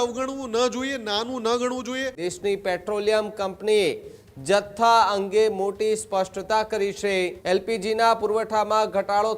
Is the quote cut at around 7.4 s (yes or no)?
yes